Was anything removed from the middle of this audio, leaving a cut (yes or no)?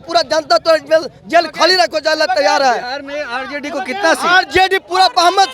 no